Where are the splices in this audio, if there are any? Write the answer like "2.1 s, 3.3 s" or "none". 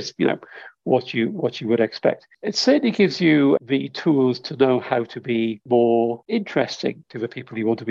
2.3 s, 3.6 s, 5.6 s, 6.2 s, 7.1 s

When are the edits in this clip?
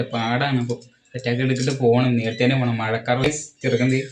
3.2 s

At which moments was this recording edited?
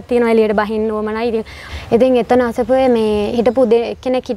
1.6 s

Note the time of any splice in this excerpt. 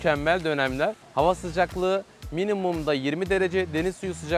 1.0 s

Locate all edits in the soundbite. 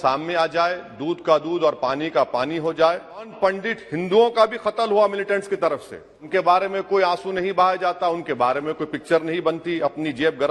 3.3 s, 6.2 s

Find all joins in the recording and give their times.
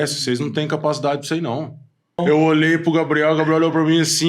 2.2 s

